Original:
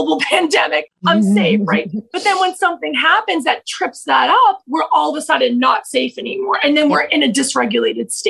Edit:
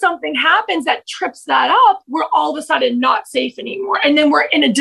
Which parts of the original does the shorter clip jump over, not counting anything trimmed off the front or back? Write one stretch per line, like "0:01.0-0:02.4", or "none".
none